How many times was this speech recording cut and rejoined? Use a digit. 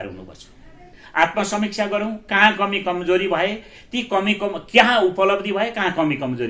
1